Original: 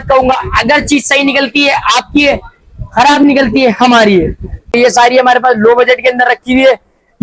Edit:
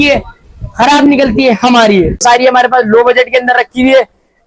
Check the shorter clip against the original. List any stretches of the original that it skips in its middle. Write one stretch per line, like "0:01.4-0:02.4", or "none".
0:04.4-0:04.9